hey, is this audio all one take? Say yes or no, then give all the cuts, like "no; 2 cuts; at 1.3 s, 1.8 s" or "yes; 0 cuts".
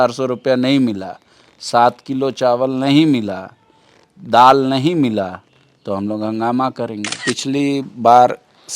no; 1 cut; at 7.2 s